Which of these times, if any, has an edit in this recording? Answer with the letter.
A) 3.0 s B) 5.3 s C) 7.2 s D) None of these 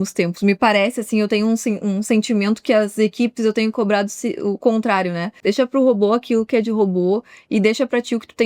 B